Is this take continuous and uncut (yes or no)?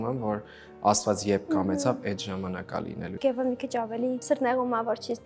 no